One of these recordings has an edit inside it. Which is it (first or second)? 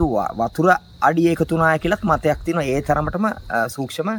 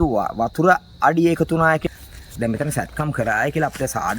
second